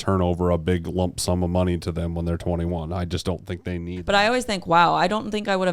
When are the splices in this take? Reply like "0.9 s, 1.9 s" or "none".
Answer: 3.9 s